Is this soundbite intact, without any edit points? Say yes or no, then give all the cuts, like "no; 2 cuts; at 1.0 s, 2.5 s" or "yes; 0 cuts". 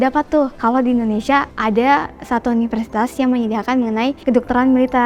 yes; 0 cuts